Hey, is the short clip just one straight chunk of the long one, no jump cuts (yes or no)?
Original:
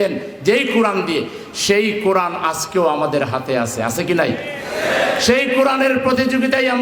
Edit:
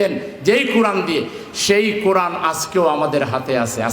yes